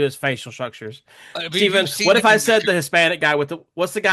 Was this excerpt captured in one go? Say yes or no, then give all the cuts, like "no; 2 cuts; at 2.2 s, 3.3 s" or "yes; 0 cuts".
yes; 0 cuts